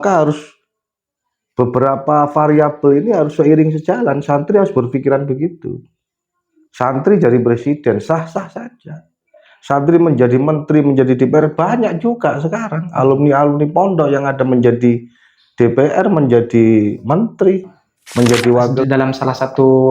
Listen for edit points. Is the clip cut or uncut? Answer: cut